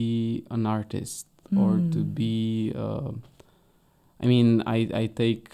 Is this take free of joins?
yes; 0 cuts

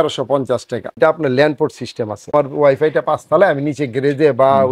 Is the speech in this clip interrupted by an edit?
yes; 2 cuts; at 0.9 s, 2.3 s

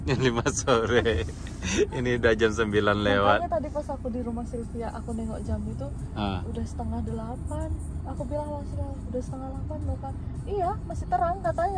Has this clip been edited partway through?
no; 0 cuts

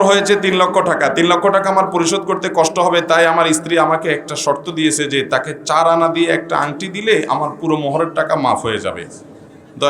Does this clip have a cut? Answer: no; 0 cuts

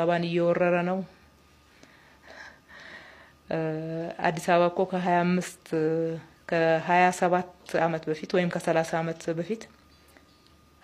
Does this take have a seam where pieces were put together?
no; 0 cuts

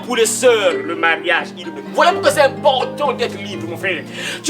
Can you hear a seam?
yes; 1 cut; at 1.8 s

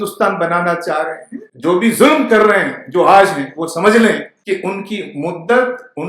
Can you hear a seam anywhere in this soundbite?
yes; 2 cuts; at 1.5 s, 4.3 s

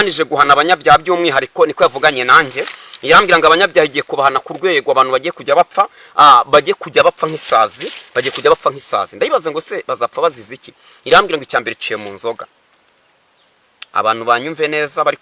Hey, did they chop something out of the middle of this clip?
no; 0 cuts

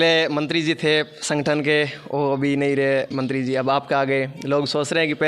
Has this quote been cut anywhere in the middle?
no; 0 cuts

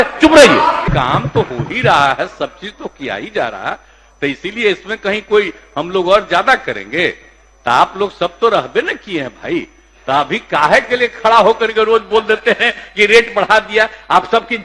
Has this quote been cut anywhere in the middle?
yes; 1 cut; at 0.9 s

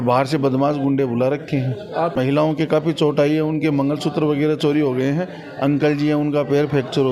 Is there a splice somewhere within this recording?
no; 0 cuts

